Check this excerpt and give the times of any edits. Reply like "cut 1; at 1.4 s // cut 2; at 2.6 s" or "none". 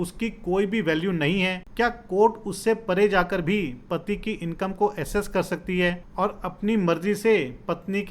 cut 1; at 1.6 s // cut 2; at 6.0 s